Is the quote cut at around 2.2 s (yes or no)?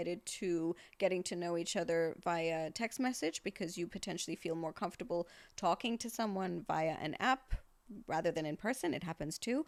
no